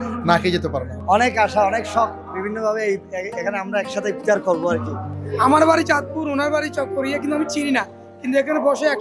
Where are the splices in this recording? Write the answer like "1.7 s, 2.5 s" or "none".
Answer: 1.0 s, 5.1 s